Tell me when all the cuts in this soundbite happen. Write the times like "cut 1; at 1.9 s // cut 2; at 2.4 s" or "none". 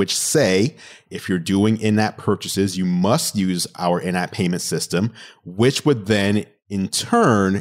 none